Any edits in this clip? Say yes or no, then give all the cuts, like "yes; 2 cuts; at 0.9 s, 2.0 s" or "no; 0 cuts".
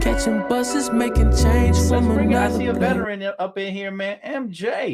yes; 1 cut; at 2.8 s